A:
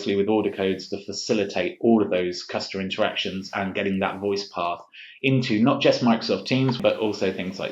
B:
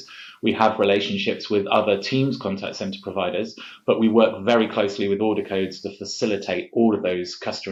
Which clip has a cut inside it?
A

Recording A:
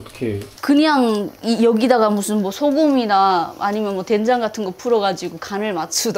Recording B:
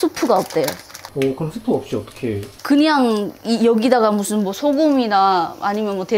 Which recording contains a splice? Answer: B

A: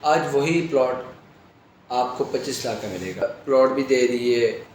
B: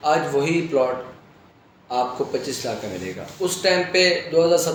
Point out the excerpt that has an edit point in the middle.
A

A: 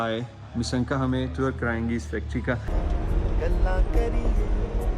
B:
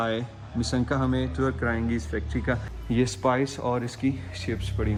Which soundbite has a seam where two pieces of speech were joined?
A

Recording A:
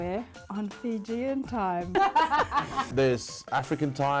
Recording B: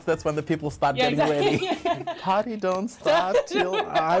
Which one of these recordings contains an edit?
A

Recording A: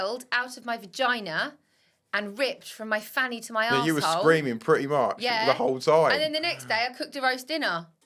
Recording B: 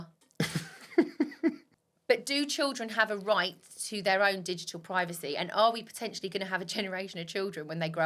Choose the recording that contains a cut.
B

